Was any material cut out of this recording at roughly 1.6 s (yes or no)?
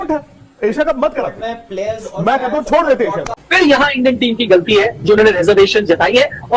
no